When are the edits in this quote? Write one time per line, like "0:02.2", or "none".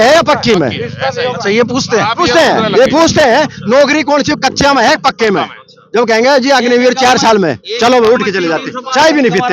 none